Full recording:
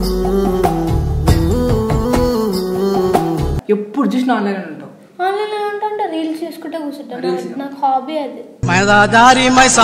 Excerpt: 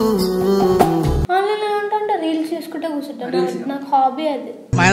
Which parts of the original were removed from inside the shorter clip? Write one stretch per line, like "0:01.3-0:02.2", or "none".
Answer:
0:03.5-0:05.1